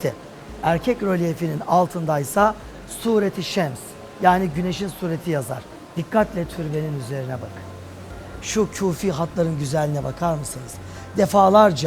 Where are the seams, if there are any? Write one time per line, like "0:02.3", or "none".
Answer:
0:05.8